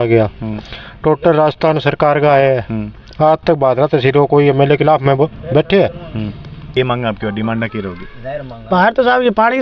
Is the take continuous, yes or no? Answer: no